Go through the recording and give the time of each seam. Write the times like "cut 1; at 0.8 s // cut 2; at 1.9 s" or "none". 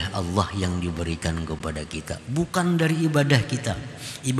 none